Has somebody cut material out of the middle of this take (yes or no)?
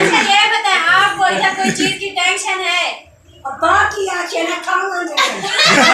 no